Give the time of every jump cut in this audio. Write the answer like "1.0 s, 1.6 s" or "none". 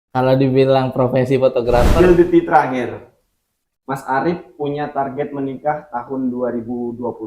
1.9 s

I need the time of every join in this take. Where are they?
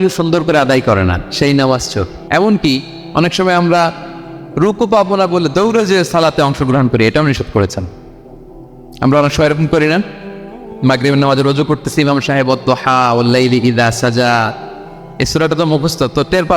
2.1 s

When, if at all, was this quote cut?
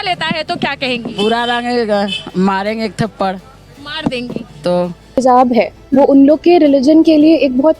5.2 s

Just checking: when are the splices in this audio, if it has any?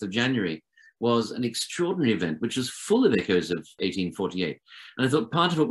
3.8 s

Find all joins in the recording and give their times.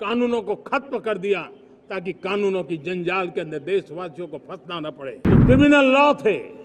5.2 s

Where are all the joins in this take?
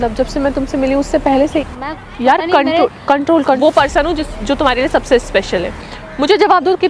1.7 s, 3.6 s

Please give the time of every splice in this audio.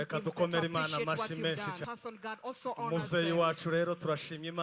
1.8 s

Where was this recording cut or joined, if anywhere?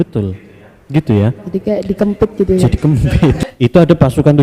3.4 s

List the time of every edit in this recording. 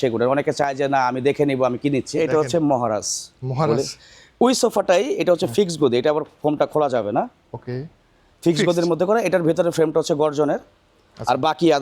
2.2 s

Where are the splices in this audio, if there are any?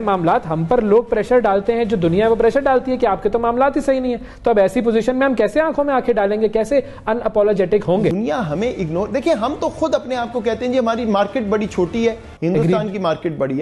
8.1 s, 12.3 s

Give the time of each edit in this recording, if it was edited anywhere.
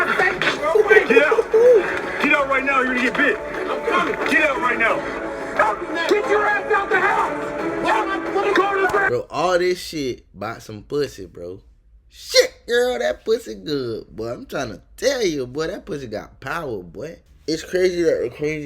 17.2 s

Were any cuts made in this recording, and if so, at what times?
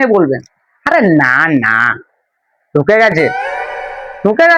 none

